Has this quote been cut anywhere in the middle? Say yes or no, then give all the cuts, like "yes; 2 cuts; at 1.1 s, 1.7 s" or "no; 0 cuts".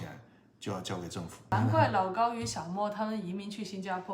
yes; 1 cut; at 1.5 s